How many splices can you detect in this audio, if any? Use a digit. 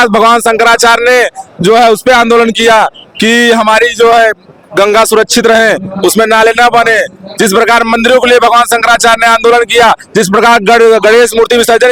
0